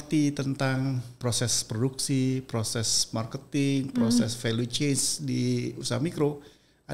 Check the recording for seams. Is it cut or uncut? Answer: cut